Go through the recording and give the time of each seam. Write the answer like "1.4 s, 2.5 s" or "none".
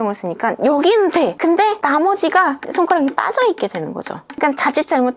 1.7 s